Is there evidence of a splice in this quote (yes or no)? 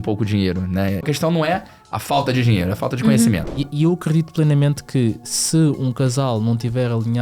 yes